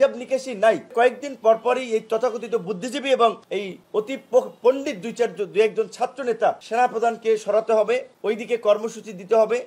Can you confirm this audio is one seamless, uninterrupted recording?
no; 1 cut; at 0.9 s

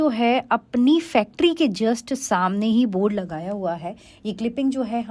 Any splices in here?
no; 0 cuts

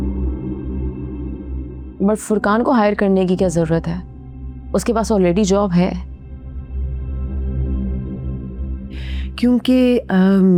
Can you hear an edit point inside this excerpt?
no; 0 cuts

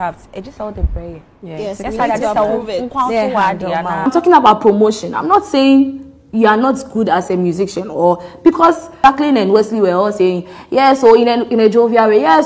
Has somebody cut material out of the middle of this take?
yes; 2 cuts; at 4.1 s, 8.9 s

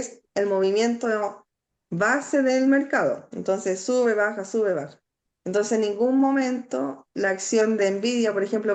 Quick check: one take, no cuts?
yes; 0 cuts

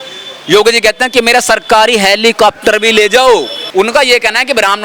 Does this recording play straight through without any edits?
no; 1 cut; at 3.6 s

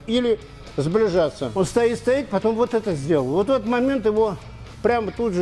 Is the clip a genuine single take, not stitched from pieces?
no; 1 cut; at 1.4 s

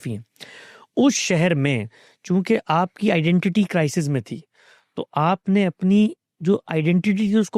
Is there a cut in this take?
no; 0 cuts

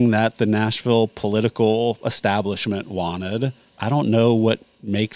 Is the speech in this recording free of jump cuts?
no; 1 cut; at 3.7 s

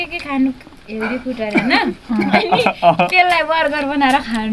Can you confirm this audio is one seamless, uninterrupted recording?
yes; 0 cuts

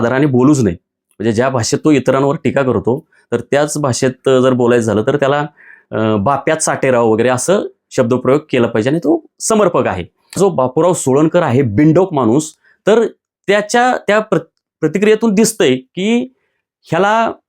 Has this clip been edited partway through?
yes; 1 cut; at 10.3 s

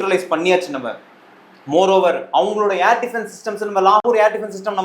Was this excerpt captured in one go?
yes; 0 cuts

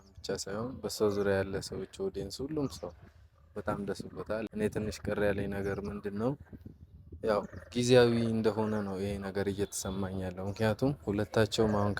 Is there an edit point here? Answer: yes; 1 cut; at 4.5 s

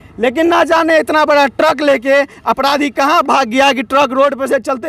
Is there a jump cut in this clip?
no; 0 cuts

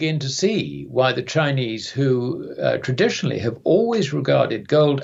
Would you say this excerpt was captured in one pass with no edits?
yes; 0 cuts

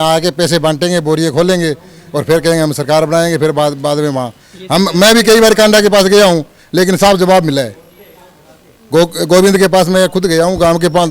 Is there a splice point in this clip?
no; 0 cuts

